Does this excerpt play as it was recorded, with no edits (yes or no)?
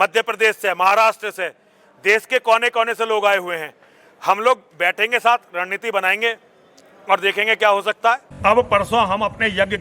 no